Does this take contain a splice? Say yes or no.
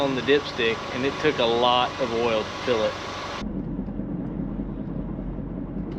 no